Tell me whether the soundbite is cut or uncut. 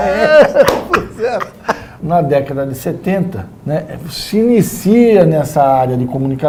uncut